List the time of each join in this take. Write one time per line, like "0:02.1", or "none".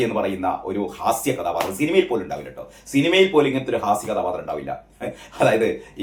none